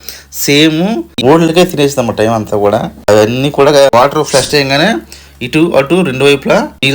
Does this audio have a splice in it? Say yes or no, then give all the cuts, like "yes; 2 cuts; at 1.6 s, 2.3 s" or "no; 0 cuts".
yes; 2 cuts; at 1.2 s, 3.9 s